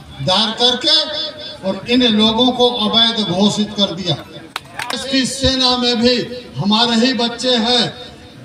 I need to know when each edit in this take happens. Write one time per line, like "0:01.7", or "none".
0:05.0